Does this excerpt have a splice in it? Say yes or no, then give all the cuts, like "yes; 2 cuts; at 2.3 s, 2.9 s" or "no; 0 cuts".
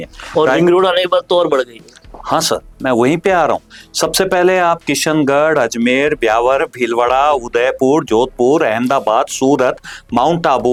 no; 0 cuts